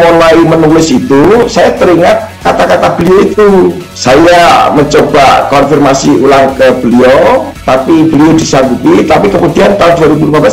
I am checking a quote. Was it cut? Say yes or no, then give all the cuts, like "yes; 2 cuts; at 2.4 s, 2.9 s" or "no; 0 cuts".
yes; 1 cut; at 3.9 s